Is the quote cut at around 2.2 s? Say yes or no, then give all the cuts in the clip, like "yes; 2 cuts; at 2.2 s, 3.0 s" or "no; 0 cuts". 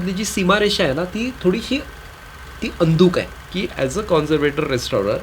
no; 1 cut; at 3.4 s